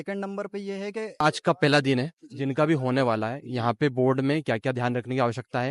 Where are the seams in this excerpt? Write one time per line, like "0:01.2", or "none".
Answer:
0:01.2